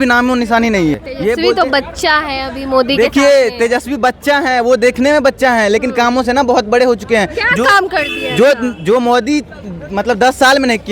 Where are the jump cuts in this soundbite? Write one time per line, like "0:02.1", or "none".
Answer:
0:01.0